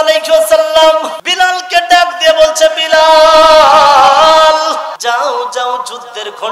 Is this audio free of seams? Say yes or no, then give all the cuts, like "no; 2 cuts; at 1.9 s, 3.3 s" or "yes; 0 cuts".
no; 2 cuts; at 1.2 s, 4.9 s